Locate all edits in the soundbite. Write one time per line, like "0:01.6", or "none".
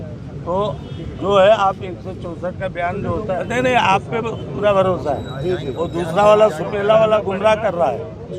0:03.4